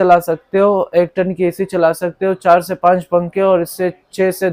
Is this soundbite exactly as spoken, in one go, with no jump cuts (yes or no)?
yes